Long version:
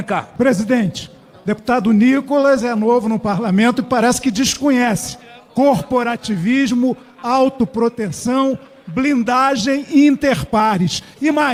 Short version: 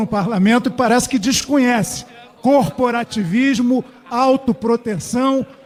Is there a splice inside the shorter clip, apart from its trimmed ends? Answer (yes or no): no